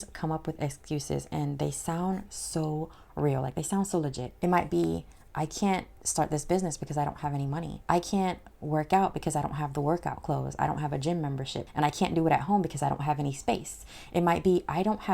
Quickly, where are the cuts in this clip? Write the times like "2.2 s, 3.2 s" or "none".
4.2 s, 7.7 s, 11.6 s